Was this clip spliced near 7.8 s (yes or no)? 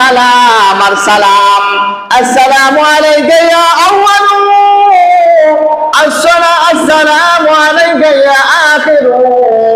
no